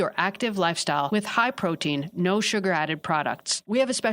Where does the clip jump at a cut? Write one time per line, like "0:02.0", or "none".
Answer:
0:01.1